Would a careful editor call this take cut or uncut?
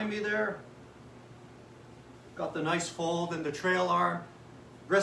uncut